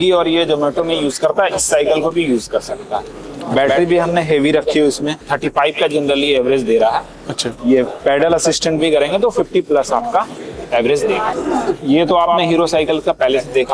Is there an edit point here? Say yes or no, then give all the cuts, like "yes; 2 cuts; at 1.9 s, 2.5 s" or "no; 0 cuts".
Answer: yes; 2 cuts; at 5.2 s, 11.4 s